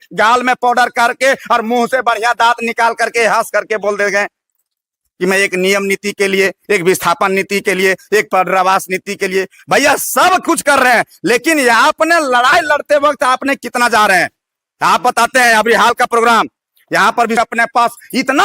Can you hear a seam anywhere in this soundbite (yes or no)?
yes